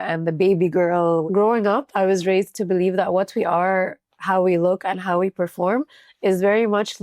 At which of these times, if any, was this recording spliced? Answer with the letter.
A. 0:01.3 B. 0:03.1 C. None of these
A